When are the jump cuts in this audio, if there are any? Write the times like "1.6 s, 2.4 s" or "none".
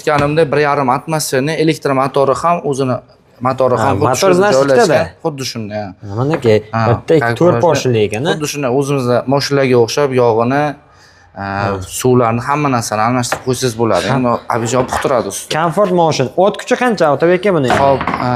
none